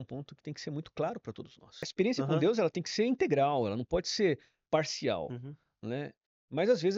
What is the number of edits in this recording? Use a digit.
1